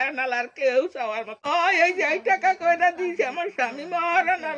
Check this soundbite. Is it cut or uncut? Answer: cut